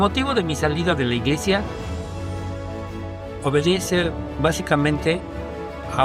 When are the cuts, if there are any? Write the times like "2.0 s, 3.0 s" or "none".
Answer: none